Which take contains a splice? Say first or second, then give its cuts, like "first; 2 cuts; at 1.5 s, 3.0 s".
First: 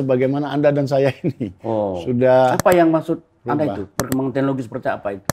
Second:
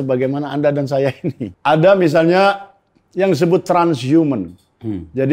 second; 1 cut; at 1.5 s